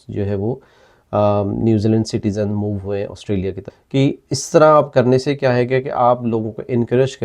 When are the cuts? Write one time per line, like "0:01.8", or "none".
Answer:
0:03.7